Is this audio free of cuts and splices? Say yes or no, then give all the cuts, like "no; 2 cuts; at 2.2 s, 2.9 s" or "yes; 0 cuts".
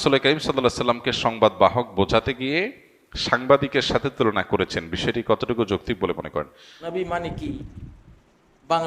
no; 1 cut; at 6.9 s